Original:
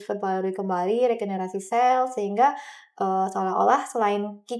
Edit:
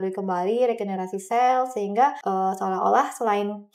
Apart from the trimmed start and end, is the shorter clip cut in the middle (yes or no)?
yes